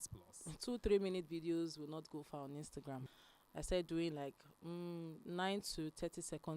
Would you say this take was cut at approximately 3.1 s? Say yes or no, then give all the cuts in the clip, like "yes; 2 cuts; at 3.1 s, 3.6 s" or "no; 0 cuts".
yes; 1 cut; at 3.1 s